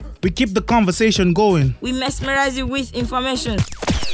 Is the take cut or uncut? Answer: uncut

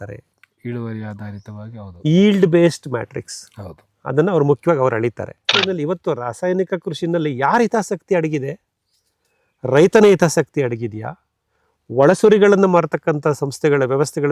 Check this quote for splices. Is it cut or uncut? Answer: cut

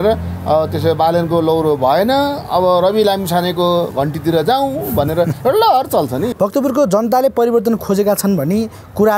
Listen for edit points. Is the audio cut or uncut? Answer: cut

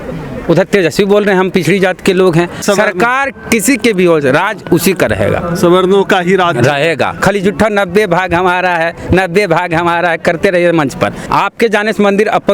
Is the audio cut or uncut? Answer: cut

